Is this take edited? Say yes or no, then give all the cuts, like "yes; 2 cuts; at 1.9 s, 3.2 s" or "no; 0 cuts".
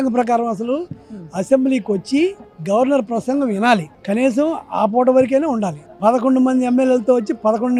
no; 0 cuts